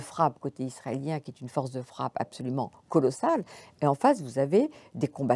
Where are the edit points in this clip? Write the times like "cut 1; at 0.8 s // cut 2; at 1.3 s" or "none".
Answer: none